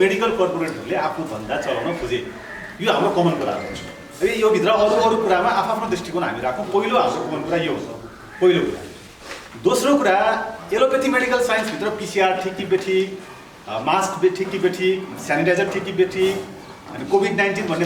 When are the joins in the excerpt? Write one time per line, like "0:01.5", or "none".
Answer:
none